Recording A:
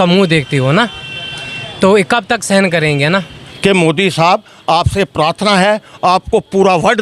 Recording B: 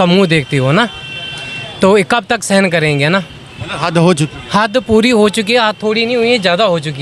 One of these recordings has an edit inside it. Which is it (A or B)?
A